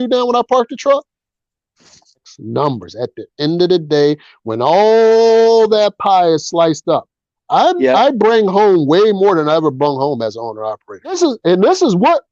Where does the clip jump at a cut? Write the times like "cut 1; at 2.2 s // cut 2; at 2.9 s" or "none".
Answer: cut 1; at 2.3 s // cut 2; at 11.2 s